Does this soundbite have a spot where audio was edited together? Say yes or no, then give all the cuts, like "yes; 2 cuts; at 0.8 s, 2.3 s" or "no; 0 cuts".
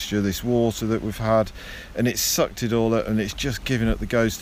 no; 0 cuts